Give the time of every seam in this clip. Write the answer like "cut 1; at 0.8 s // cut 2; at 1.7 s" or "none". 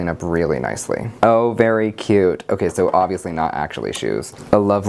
cut 1; at 1.1 s